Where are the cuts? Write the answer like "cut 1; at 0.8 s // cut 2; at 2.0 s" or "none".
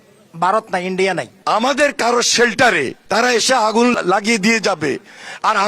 cut 1; at 1.3 s // cut 2; at 3.0 s // cut 3; at 3.9 s

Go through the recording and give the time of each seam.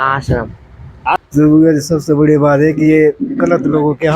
cut 1; at 1.2 s

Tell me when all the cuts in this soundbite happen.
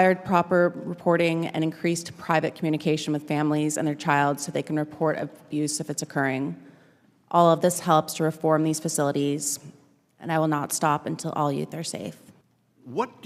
none

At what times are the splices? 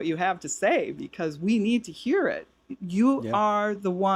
none

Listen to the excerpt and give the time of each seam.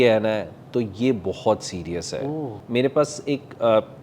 cut 1; at 2.5 s

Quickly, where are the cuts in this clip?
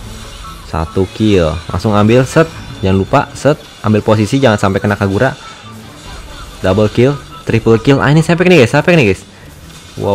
none

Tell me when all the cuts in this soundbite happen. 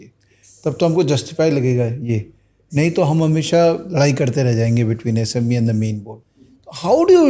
cut 1; at 6.1 s

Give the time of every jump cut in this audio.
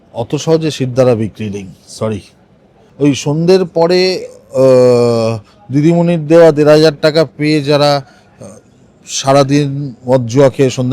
cut 1; at 2.8 s

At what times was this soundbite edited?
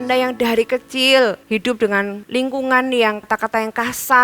cut 1; at 1.8 s // cut 2; at 3.2 s

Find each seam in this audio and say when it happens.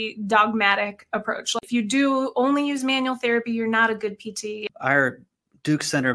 cut 1; at 1.5 s // cut 2; at 4.7 s

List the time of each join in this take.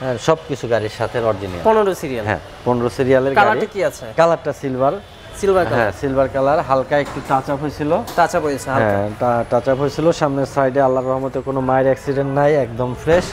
none

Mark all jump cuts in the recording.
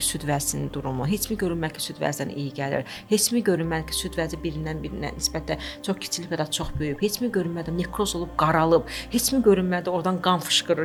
none

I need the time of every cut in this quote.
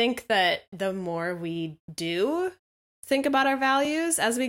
cut 1; at 1.8 s

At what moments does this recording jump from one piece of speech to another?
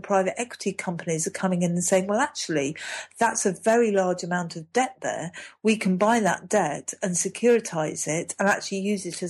none

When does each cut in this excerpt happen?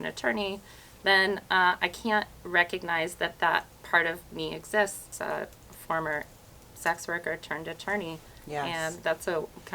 cut 1; at 5.1 s

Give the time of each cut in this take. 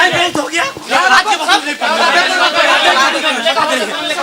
none

